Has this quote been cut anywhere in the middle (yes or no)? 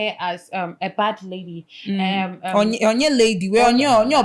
no